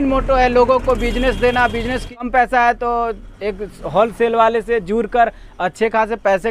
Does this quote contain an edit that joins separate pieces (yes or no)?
yes